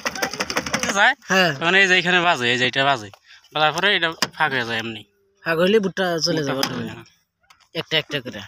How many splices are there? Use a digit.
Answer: 1